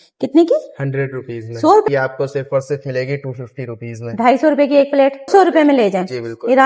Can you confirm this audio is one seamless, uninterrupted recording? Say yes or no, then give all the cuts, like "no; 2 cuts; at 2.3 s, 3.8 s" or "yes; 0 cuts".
no; 2 cuts; at 1.9 s, 5.3 s